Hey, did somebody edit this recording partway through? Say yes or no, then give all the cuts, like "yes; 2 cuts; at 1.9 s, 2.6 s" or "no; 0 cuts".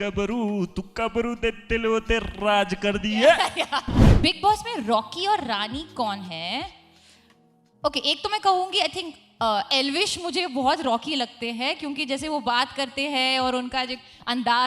yes; 1 cut; at 4.0 s